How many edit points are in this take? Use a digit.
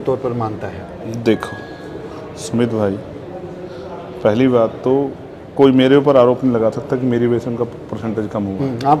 0